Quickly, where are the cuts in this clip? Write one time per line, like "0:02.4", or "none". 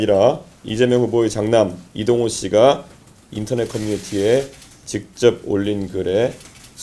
none